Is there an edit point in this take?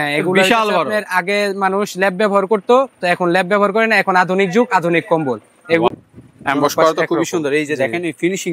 yes; 1 cut; at 5.9 s

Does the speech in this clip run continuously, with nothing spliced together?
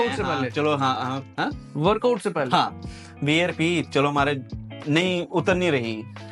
yes; 0 cuts

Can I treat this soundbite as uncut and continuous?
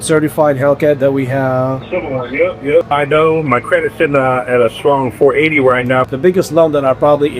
no; 2 cuts; at 2.9 s, 6.1 s

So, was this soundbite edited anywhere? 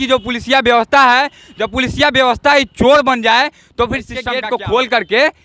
yes; 1 cut; at 4.2 s

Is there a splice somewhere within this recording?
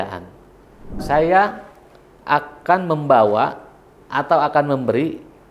yes; 1 cut; at 1.0 s

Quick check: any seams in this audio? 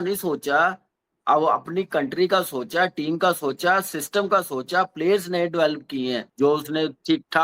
yes; 1 cut; at 6.3 s

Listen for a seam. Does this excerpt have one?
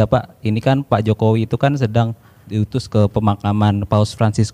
yes; 1 cut; at 2.4 s

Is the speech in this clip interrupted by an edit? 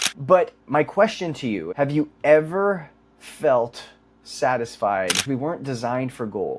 yes; 2 cuts; at 1.6 s, 5.3 s

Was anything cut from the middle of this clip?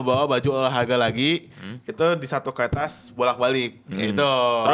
no; 0 cuts

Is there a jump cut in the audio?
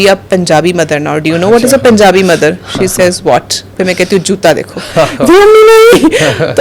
no; 0 cuts

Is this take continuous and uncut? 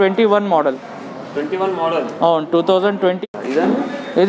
no; 1 cut; at 3.2 s

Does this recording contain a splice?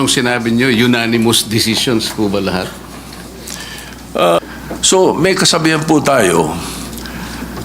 yes; 1 cut; at 4.4 s

